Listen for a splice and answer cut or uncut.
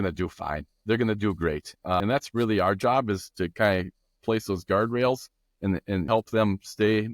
cut